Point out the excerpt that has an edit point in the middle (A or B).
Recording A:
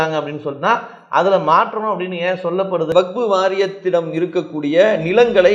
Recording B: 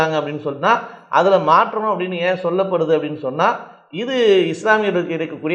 A